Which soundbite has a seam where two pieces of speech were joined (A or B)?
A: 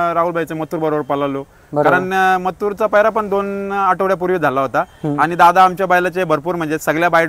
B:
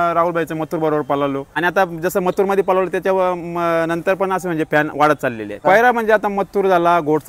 B